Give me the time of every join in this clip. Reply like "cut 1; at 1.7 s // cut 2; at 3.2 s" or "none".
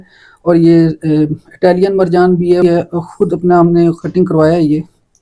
cut 1; at 2.6 s